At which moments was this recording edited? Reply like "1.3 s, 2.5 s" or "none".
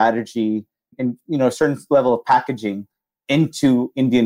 0.9 s